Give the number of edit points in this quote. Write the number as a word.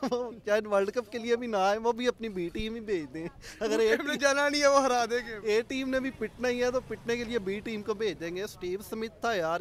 zero